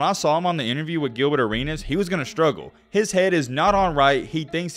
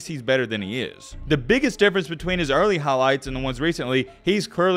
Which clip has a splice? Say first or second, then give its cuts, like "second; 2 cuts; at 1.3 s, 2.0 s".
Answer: second; 1 cut; at 1.1 s